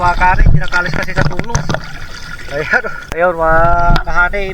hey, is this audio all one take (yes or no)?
no